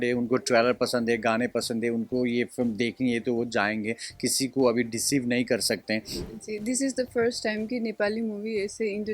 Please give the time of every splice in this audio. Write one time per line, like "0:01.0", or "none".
0:06.1